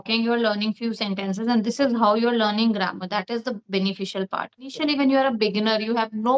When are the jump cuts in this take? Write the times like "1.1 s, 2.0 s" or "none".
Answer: 4.8 s